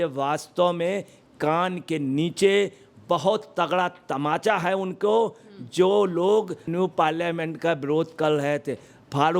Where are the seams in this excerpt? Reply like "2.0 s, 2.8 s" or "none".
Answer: 6.7 s

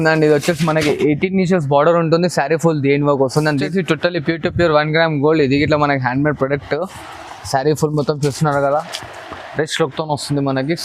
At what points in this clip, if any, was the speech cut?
3.6 s

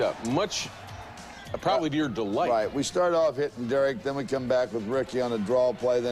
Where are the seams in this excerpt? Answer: 3.1 s

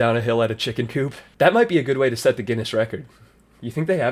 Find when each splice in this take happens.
1.3 s

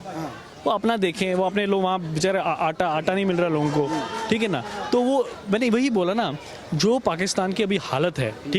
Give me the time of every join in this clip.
none

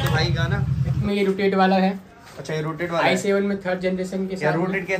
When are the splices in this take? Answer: 1.0 s

